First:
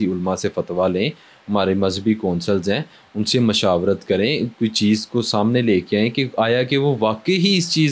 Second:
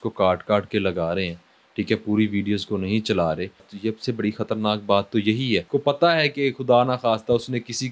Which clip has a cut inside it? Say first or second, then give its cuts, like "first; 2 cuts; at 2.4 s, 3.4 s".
second; 2 cuts; at 3.7 s, 5.6 s